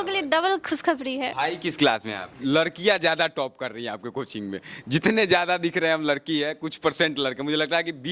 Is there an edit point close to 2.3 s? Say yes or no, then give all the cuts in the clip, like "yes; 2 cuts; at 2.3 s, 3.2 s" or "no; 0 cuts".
yes; 1 cut; at 2.3 s